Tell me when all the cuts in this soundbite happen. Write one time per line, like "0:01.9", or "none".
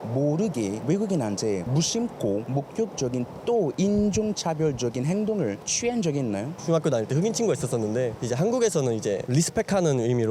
none